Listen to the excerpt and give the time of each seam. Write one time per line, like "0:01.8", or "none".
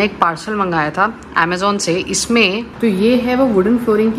0:02.2